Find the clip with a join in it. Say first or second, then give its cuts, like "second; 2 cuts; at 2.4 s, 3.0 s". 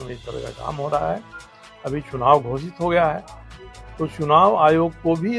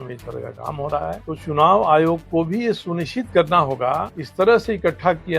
second; 2 cuts; at 1.3 s, 4.2 s